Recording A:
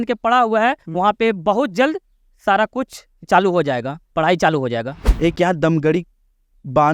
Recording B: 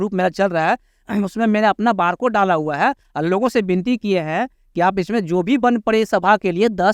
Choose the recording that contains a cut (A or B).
A